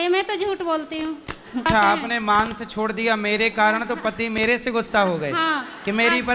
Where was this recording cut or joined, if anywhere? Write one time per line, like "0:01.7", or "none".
0:01.6